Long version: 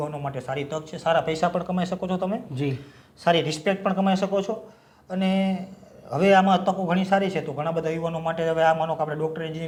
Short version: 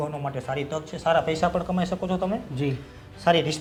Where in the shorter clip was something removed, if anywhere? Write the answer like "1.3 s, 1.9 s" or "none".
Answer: none